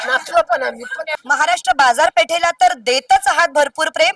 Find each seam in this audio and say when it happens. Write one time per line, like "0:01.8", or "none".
0:01.2